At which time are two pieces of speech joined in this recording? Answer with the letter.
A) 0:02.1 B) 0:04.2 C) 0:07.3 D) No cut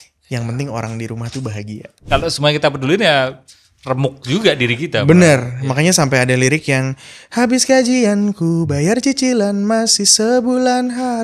A